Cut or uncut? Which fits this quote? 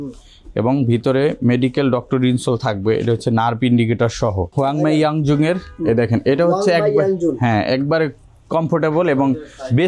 cut